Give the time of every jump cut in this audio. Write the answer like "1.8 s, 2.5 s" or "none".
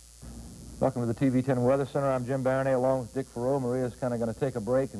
none